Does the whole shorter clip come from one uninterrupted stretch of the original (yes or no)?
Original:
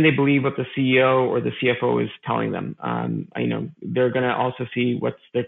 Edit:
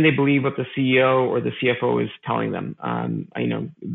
yes